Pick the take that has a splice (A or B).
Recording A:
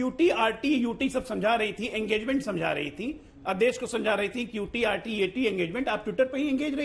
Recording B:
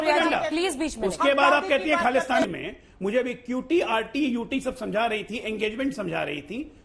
B